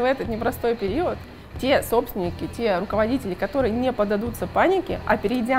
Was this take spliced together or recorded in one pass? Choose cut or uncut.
uncut